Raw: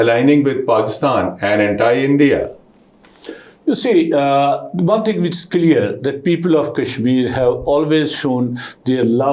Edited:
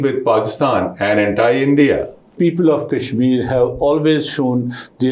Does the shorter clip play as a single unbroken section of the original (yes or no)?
no